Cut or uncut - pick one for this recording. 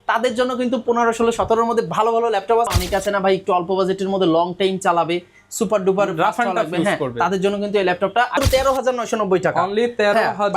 cut